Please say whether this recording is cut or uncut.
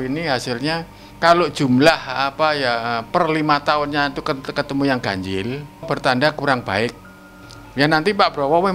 cut